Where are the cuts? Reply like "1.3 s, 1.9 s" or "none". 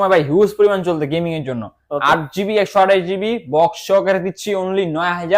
none